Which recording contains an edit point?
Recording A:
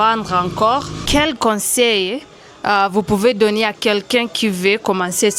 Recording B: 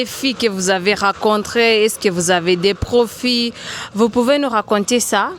A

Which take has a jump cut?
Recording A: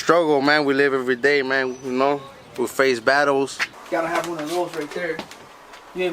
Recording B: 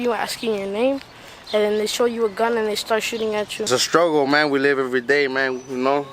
A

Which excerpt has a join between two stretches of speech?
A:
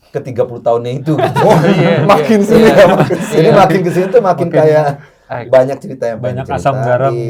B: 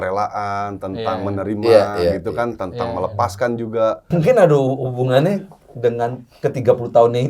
B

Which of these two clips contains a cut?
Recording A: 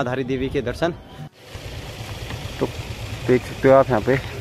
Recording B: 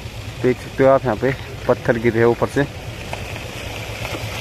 A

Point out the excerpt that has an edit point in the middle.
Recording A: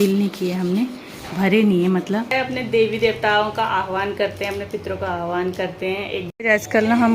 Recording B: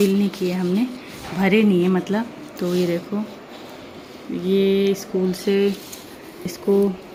A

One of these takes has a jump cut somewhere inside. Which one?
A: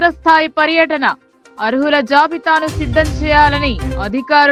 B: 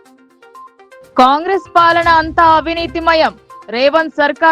B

